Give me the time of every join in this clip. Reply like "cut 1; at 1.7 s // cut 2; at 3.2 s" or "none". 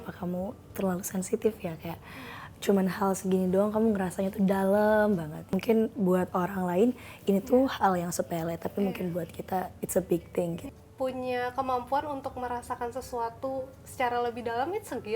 cut 1; at 5.5 s // cut 2; at 10.6 s